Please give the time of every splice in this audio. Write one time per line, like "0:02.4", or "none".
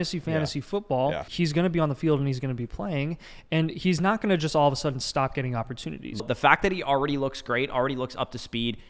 0:01.3
0:06.2